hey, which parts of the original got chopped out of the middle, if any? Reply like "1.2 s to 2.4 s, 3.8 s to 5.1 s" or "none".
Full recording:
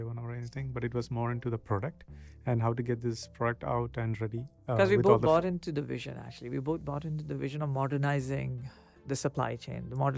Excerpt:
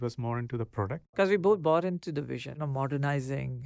2.1 s to 4.8 s, 6.2 s to 7.6 s